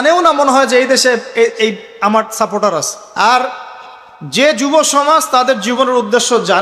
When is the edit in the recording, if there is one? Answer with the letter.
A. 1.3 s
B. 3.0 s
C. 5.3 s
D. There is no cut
B